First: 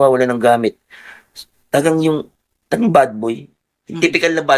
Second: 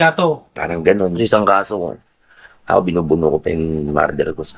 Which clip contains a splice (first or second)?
second